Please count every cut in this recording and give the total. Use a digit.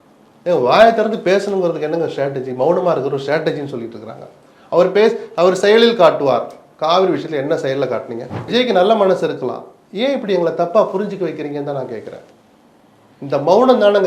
1